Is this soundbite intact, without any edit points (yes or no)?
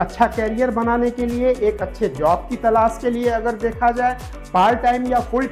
yes